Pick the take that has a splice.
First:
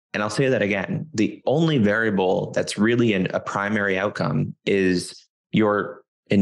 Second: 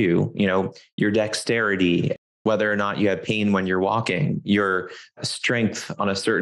second; 2 cuts; at 2.2 s, 5.1 s

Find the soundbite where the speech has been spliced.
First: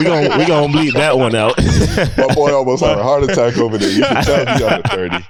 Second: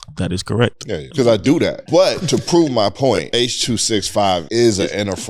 second; 4 cuts; at 1.1 s, 1.8 s, 3.3 s, 4.5 s

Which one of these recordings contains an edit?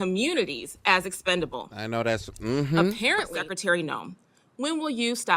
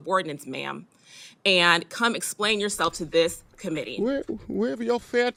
first; 1 cut; at 3.4 s

